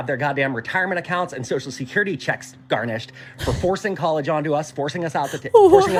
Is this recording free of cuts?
yes; 0 cuts

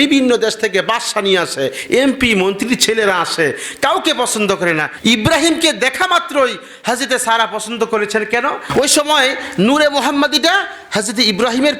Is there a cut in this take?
yes; 2 cuts; at 4.9 s, 8.6 s

